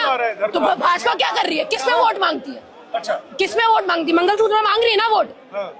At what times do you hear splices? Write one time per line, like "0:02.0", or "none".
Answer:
none

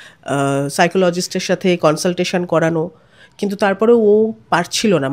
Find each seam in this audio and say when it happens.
none

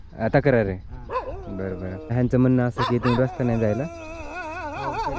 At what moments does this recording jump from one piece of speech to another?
0:02.1

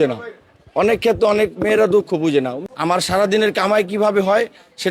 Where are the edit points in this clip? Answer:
0:02.6

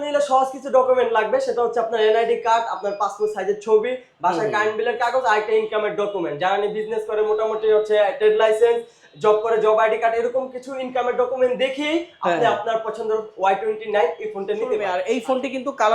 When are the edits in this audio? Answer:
0:14.9

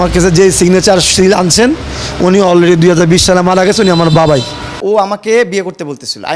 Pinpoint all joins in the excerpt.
0:04.7

